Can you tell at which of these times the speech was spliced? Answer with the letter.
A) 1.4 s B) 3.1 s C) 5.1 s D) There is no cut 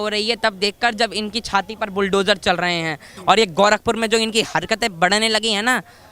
B